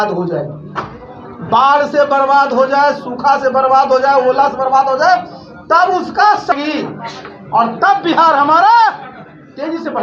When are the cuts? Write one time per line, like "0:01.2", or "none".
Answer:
0:06.5